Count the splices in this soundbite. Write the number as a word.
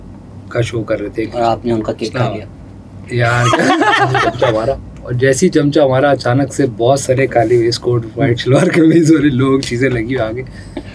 one